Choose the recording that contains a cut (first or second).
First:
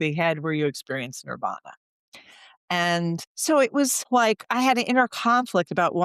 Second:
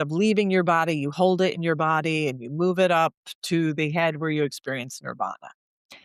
first